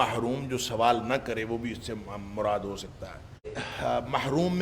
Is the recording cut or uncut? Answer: cut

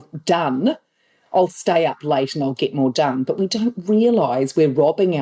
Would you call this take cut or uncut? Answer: uncut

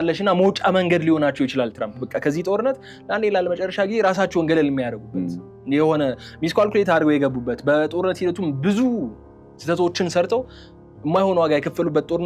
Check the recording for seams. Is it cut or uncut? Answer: uncut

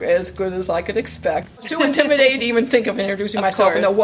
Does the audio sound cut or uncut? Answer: cut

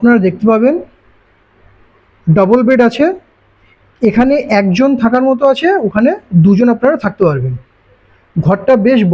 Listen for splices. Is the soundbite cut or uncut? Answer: uncut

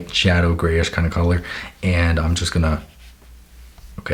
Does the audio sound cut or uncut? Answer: uncut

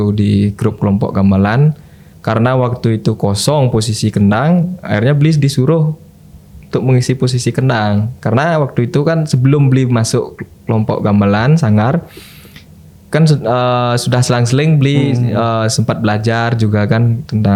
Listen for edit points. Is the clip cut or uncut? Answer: uncut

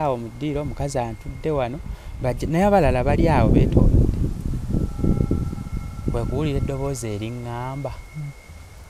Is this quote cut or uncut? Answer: uncut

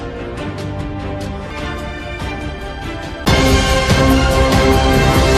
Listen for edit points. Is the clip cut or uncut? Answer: uncut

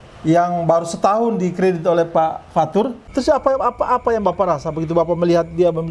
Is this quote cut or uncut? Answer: cut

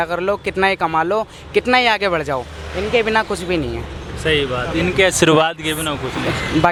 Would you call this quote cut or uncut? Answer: uncut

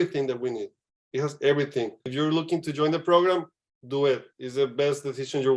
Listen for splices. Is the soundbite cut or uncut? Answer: cut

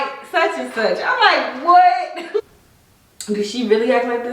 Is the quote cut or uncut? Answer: cut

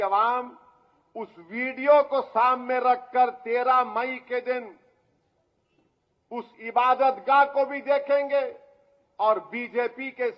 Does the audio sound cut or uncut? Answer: uncut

